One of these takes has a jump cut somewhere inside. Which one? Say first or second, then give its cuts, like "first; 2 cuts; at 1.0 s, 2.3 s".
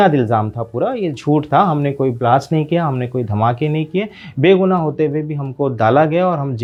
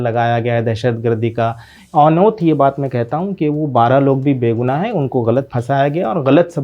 second; 1 cut; at 1.8 s